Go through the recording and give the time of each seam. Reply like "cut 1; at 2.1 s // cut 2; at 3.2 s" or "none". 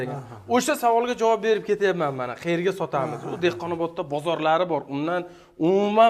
none